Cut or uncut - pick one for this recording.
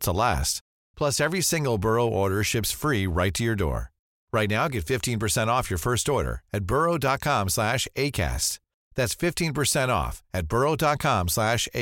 uncut